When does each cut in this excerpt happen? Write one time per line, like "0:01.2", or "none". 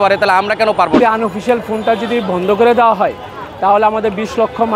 0:01.0

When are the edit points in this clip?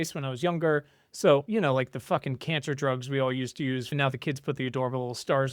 0:01.5
0:03.9

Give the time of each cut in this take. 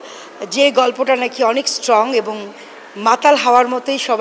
none

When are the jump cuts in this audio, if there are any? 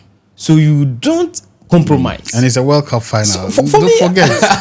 none

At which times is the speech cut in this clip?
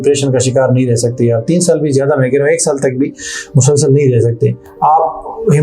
0:04.7

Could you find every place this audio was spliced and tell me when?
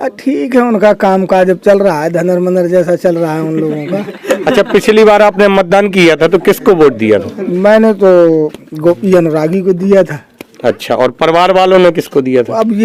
none

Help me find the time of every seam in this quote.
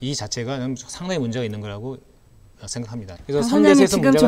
0:03.1

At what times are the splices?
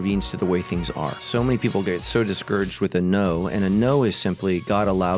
0:01.1

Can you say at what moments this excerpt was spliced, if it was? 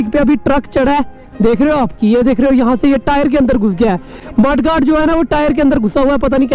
0:02.0

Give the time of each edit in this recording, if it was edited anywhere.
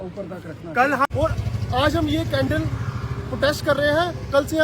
0:01.1

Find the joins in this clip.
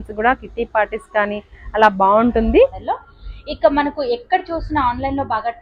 0:02.9

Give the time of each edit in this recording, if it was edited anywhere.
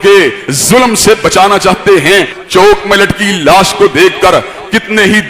0:02.4

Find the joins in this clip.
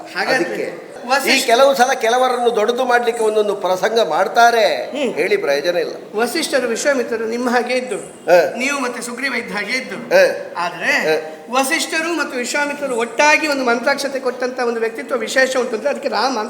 0:01.0

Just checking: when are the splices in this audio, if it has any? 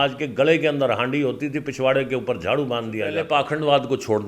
0:03.2

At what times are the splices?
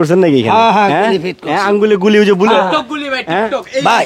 none

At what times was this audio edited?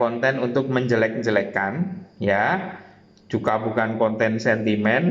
none

